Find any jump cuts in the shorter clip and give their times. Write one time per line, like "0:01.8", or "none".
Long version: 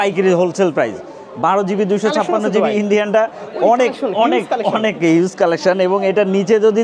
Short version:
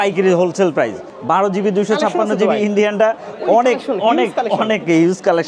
0:01.1